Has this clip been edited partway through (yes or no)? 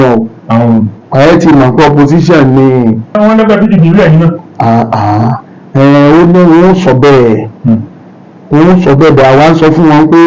yes